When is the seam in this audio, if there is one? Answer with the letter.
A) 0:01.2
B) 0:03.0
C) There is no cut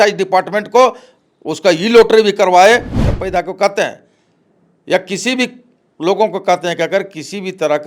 B